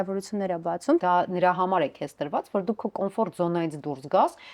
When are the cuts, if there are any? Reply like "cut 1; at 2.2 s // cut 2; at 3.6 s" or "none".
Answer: cut 1; at 1.0 s